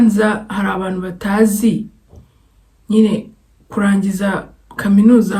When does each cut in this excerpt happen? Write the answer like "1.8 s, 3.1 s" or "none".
none